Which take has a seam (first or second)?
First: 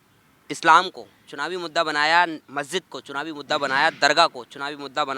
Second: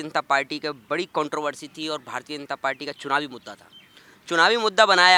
first